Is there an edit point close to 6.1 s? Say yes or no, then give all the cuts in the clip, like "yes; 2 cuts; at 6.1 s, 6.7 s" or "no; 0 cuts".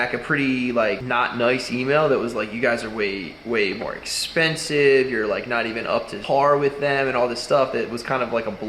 yes; 2 cuts; at 1.0 s, 6.1 s